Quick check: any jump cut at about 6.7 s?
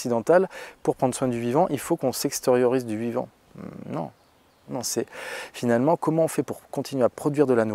no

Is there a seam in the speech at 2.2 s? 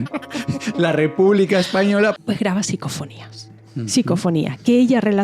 yes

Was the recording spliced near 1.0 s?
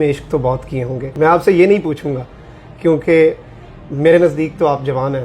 yes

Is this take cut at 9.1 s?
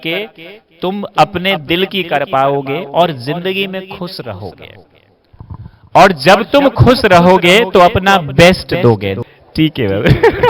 yes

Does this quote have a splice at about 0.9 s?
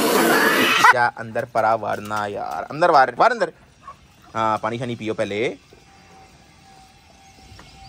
yes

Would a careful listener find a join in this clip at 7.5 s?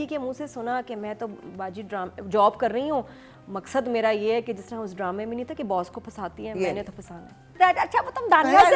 yes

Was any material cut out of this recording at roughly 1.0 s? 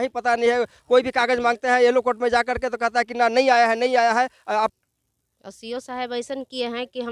no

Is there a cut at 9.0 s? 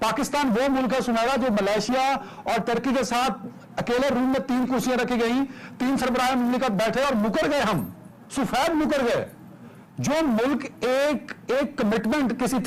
no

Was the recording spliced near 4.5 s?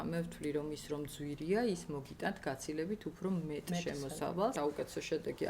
yes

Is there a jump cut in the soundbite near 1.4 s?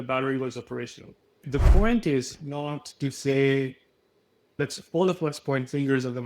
yes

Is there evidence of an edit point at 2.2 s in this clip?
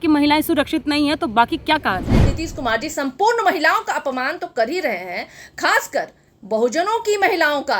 yes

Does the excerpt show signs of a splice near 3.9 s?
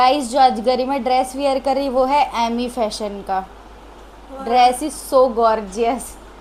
no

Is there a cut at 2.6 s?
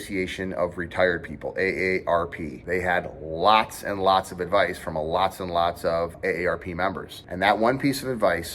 yes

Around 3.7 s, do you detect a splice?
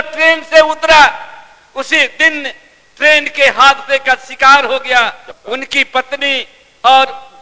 no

